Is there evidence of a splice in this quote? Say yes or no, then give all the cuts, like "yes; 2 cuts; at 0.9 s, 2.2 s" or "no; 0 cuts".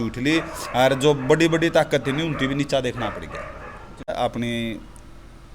yes; 1 cut; at 4.1 s